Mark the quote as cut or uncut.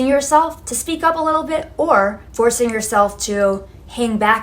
uncut